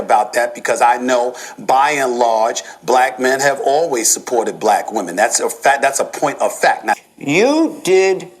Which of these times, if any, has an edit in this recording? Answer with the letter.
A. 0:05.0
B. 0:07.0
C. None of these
B